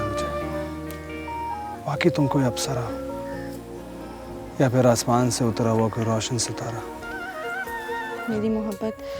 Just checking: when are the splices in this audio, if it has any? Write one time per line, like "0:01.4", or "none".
0:01.3
0:04.4
0:08.2

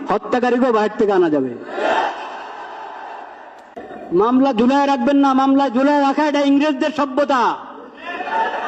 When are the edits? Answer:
0:04.0

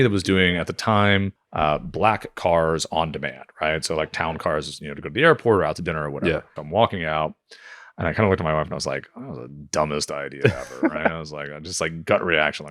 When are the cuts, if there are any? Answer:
0:01.4
0:06.6

